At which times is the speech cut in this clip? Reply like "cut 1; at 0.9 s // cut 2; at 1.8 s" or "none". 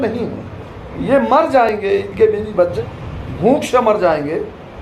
none

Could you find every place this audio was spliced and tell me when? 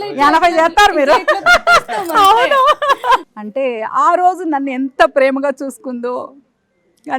cut 1; at 3.3 s

